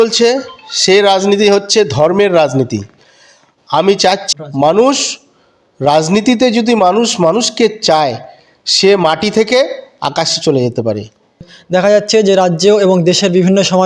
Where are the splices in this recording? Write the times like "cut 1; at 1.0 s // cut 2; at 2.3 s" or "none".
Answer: cut 1; at 4.3 s // cut 2; at 11.4 s